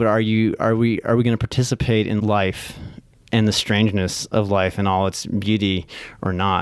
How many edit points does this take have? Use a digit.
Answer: 1